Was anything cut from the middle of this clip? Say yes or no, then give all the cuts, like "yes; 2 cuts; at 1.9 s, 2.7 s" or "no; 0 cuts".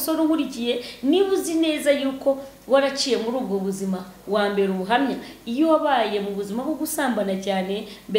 no; 0 cuts